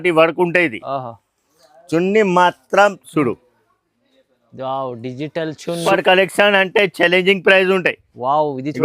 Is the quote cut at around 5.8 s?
yes; 1 cut; at 5.8 s

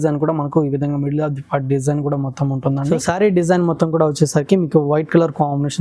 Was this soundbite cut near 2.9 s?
yes; 1 cut; at 2.9 s

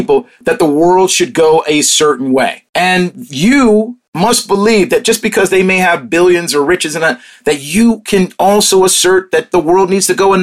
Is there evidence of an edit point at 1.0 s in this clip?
no; 2 cuts; at 2.6 s, 4.0 s

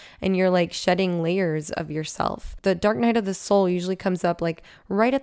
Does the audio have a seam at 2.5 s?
yes; 1 cut; at 2.5 s

